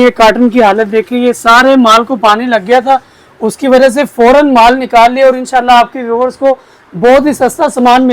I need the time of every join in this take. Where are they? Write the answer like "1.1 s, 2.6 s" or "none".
none